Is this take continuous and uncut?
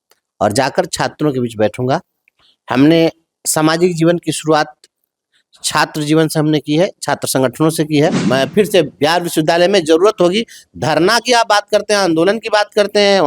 no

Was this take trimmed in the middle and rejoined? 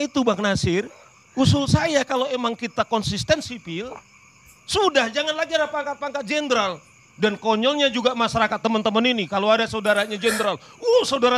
no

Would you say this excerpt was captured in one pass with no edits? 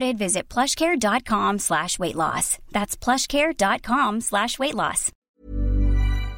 no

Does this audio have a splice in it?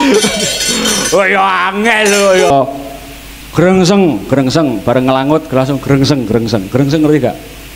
yes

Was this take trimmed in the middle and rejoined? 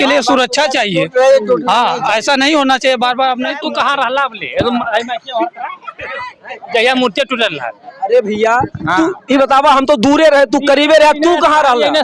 yes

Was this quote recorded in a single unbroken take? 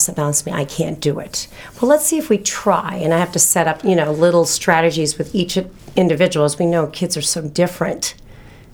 yes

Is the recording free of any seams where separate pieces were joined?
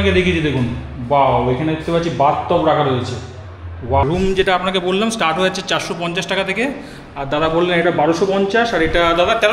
no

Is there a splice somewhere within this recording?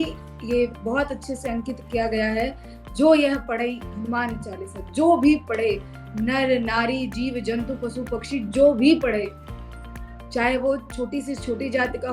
no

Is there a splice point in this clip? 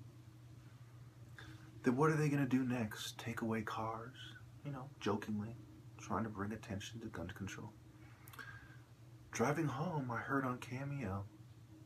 yes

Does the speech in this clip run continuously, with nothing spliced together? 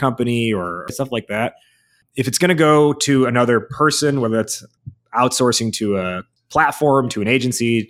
no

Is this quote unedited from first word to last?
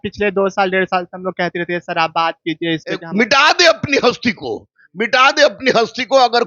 no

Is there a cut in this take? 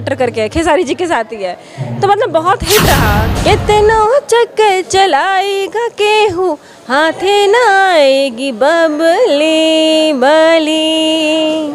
yes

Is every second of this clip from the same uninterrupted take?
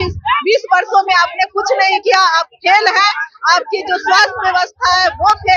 yes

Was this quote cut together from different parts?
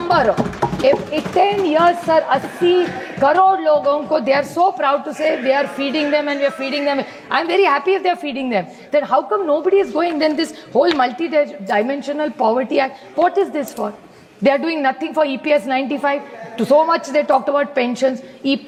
no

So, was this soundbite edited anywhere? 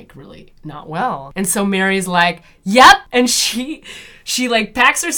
no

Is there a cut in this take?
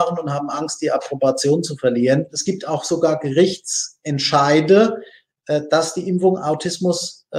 yes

